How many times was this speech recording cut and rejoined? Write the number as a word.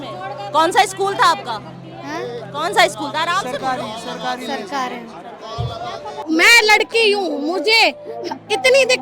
one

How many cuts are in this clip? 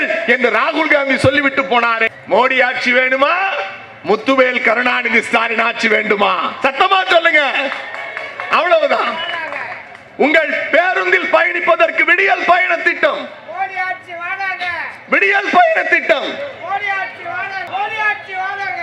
two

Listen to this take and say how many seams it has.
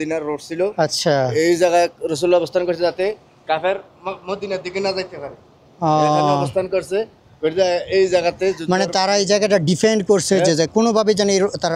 zero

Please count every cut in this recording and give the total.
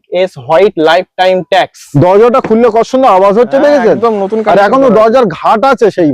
one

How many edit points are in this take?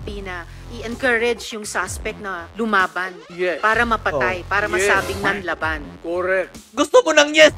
two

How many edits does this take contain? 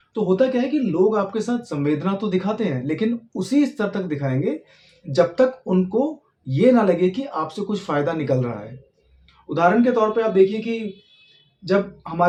zero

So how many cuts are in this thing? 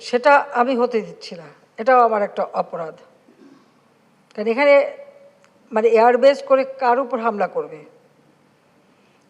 zero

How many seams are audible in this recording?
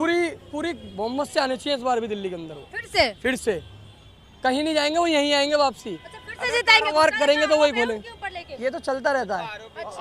zero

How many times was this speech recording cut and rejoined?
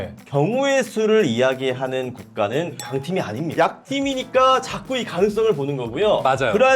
one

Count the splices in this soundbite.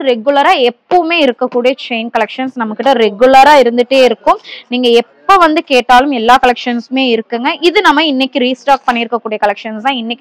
zero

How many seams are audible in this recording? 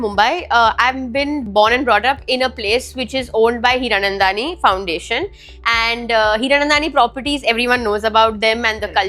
one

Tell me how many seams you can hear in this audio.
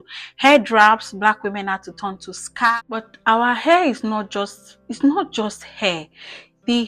one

